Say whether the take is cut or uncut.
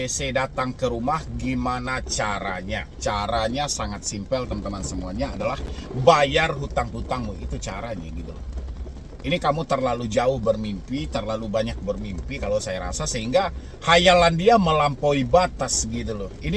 uncut